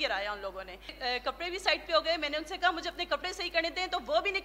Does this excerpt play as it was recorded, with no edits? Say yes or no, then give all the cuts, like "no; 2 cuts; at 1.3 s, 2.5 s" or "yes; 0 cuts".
no; 1 cut; at 0.9 s